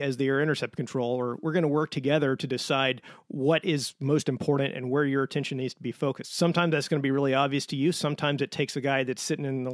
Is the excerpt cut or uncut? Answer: uncut